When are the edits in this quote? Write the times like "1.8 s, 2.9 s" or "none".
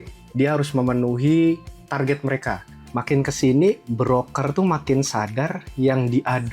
2.8 s